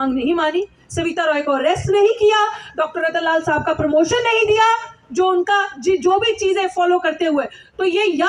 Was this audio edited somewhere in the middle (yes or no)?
no